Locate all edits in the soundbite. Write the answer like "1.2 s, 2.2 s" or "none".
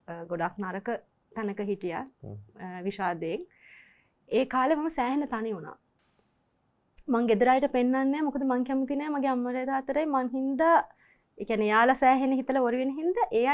none